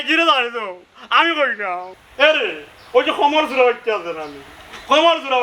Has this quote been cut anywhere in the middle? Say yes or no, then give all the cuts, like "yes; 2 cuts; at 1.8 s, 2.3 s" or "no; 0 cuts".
no; 0 cuts